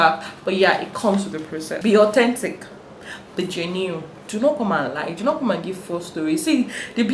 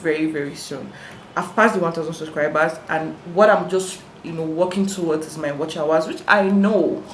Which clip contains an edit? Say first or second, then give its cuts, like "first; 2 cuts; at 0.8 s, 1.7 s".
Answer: first; 1 cut; at 1.6 s